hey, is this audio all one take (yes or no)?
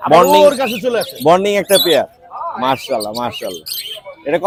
yes